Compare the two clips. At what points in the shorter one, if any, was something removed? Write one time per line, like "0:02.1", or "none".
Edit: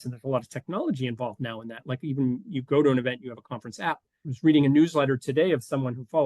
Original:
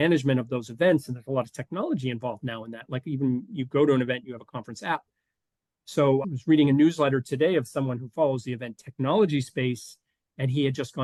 0:04.3